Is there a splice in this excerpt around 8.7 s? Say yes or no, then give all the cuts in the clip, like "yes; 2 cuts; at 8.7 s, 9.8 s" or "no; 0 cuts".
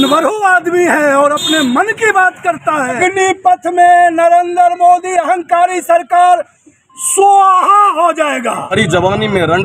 yes; 2 cuts; at 3.0 s, 8.7 s